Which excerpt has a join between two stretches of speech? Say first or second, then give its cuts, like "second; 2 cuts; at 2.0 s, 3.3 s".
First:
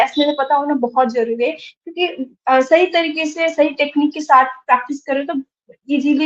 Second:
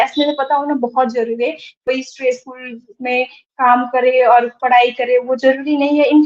second; 1 cut; at 1.9 s